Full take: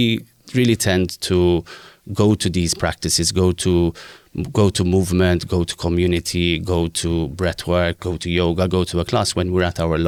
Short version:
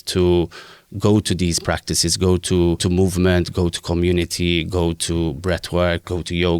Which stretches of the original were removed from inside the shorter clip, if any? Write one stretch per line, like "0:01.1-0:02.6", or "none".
0:04.0-0:04.8